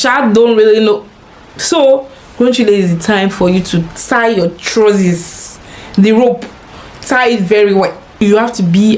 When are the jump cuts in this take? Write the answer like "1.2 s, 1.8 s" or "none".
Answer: 8.0 s